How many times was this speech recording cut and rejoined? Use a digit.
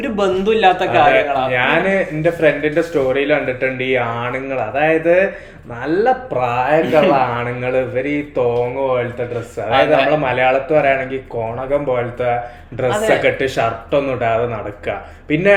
0